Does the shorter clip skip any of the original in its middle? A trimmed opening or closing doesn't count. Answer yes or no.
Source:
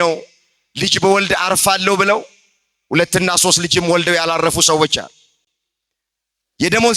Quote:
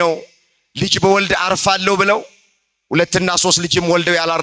no